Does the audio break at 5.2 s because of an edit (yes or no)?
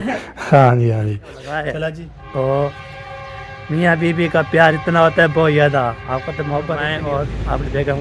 no